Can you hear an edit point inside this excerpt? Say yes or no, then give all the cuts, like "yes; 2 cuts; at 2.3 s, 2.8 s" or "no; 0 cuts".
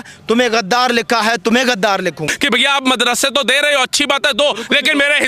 yes; 1 cut; at 2.3 s